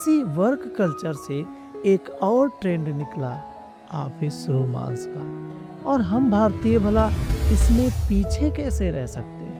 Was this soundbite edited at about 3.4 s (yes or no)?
no